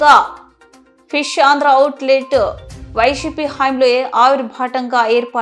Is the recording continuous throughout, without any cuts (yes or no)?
yes